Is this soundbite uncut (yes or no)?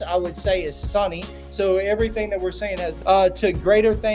no